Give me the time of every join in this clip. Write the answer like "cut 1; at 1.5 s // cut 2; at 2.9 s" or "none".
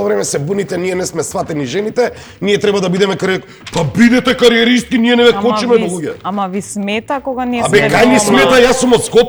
none

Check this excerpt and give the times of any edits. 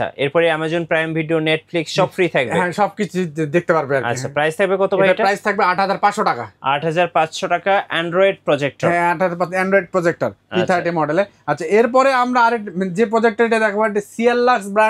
none

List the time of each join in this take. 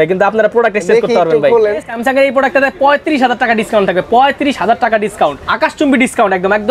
cut 1; at 1.9 s // cut 2; at 5.4 s

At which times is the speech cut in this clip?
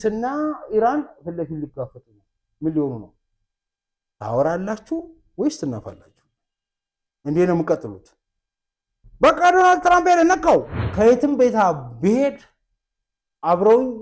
cut 1; at 10.8 s

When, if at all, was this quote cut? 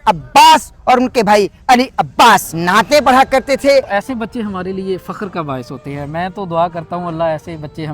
cut 1; at 2.5 s // cut 2; at 3.9 s

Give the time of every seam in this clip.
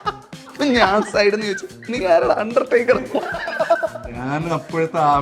none

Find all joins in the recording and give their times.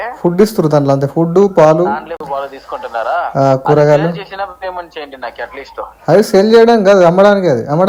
none

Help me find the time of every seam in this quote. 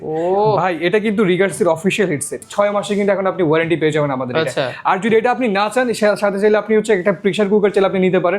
cut 1; at 2.4 s

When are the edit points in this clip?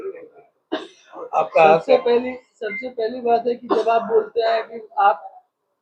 none

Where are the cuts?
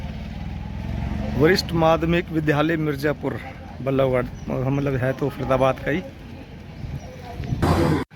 none

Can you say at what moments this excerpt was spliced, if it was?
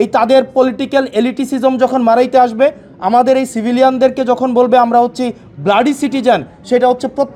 none

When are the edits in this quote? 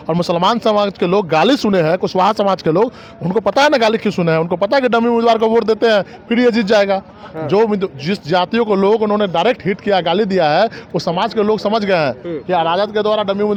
none

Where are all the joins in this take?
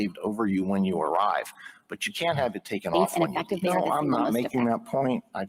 cut 1; at 3.1 s

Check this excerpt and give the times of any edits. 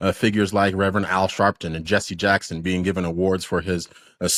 none

